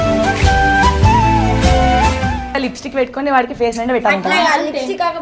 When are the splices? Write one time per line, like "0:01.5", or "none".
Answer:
0:02.6